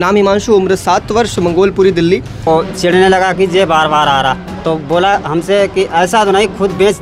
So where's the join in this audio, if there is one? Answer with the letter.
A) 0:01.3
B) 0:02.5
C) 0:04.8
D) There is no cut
B